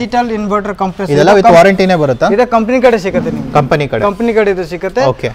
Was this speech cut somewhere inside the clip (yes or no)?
no